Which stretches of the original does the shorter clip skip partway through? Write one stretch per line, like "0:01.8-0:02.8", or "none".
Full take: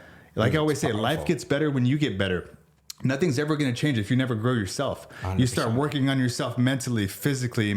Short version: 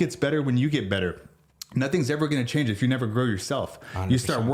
none

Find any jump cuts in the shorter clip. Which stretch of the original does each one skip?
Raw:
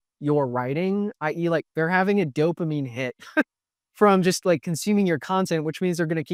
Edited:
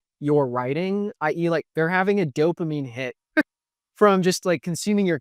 none

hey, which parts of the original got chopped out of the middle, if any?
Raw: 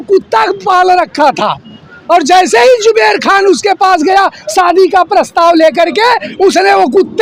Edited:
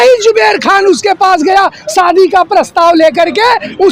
none

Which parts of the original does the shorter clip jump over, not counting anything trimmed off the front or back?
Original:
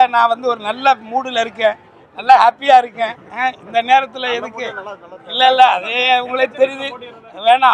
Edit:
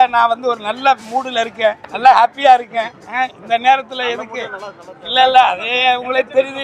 0:01.9-0:02.1

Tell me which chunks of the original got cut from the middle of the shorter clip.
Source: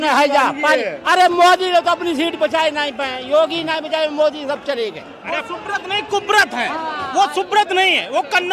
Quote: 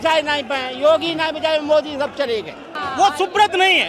0:05.2-0:06.9

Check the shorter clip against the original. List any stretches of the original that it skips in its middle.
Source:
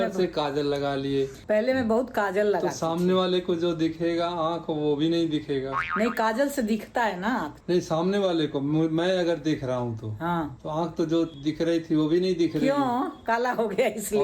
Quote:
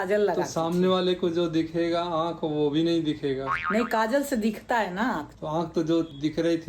0:07.6-0:10.5

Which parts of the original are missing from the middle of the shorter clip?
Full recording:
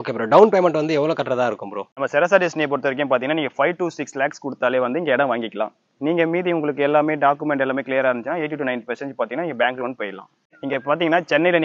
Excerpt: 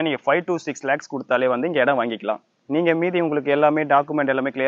none

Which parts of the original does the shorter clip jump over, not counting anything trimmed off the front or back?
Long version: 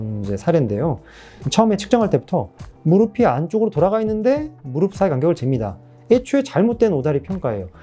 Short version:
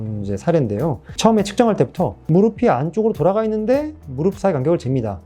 0:01.1-0:01.4
0:02.5-0:02.7

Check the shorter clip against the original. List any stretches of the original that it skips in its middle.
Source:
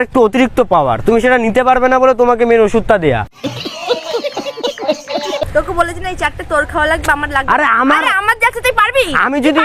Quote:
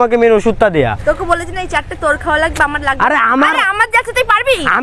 0:03.3-0:05.5

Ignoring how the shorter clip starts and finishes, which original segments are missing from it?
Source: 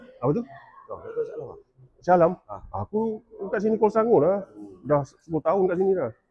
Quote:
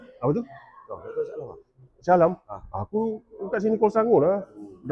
none

